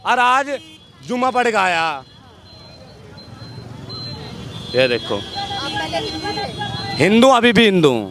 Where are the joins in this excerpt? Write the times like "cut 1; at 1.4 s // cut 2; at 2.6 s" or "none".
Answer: none